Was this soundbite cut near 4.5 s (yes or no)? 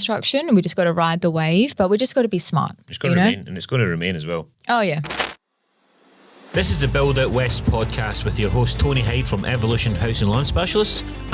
yes